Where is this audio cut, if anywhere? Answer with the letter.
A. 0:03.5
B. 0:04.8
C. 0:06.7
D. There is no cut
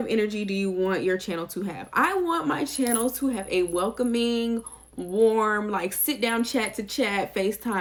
D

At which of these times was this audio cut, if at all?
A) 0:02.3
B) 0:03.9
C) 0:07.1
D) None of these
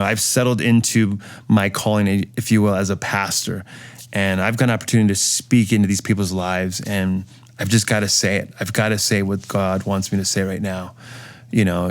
A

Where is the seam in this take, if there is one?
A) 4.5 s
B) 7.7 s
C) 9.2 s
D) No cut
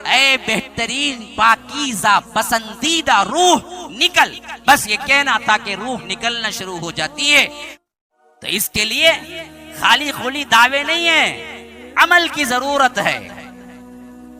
B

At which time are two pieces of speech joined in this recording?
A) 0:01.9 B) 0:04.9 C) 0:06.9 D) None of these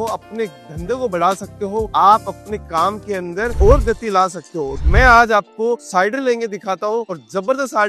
B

